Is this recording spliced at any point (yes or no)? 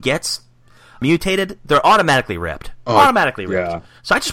yes